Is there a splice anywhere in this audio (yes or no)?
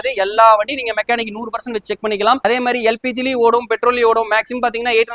yes